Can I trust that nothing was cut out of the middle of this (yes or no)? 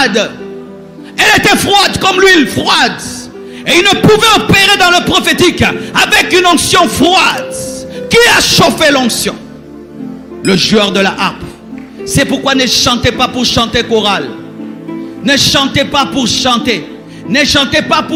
yes